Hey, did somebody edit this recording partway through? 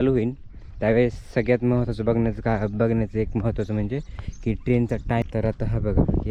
yes; 1 cut; at 5.2 s

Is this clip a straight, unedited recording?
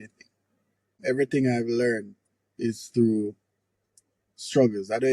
no; 1 cut; at 1.0 s

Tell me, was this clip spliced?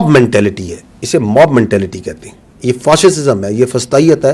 no; 0 cuts

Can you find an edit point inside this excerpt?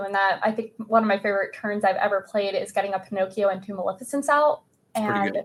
no; 0 cuts

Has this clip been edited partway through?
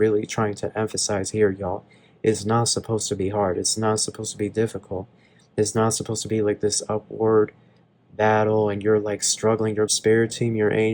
yes; 1 cut; at 9.9 s

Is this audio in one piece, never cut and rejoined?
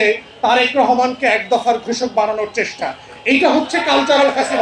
yes; 0 cuts

